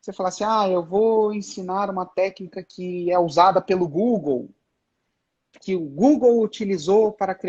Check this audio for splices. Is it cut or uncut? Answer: uncut